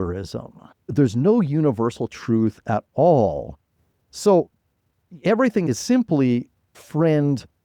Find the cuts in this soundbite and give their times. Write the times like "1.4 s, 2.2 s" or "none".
0.9 s, 5.6 s, 6.8 s